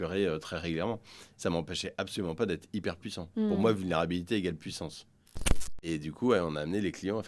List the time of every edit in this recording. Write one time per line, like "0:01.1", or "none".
0:01.2
0:05.6